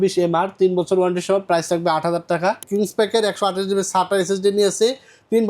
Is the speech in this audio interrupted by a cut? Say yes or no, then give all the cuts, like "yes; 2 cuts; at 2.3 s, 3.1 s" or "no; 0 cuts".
yes; 1 cut; at 2.6 s